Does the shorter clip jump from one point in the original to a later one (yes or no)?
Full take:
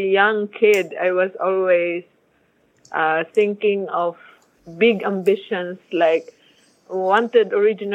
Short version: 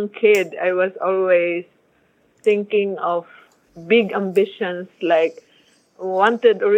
yes